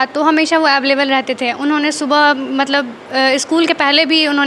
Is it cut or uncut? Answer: uncut